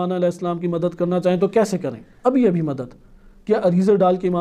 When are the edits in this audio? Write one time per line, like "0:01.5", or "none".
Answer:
none